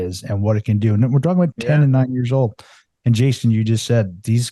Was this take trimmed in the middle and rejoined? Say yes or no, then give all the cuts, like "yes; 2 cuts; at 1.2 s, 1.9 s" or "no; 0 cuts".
yes; 1 cut; at 1.5 s